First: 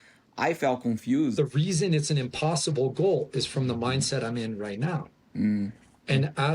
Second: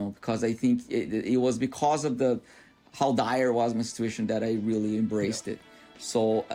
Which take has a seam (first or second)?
first